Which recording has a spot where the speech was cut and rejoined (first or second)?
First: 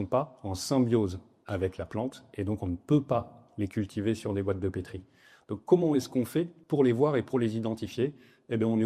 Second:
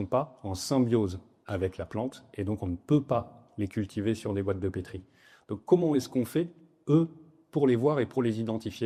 first